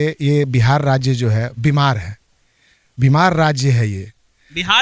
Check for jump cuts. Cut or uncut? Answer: uncut